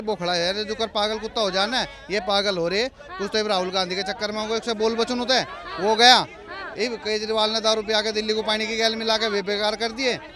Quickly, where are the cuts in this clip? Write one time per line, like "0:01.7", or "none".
none